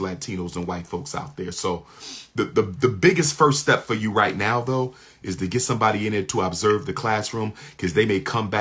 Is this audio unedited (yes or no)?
yes